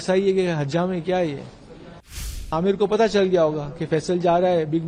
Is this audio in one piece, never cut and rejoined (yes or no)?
no